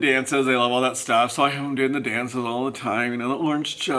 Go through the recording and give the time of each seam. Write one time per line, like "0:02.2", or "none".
none